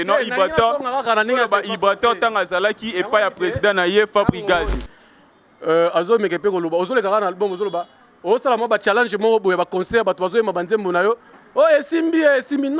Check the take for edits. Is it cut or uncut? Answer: cut